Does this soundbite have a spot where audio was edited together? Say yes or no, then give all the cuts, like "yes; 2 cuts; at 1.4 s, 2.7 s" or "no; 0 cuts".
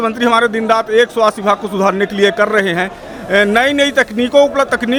no; 0 cuts